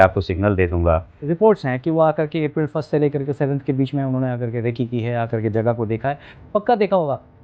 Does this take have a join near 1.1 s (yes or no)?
yes